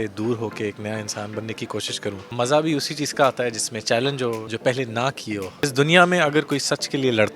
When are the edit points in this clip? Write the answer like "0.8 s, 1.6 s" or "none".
2.3 s, 4.5 s, 5.6 s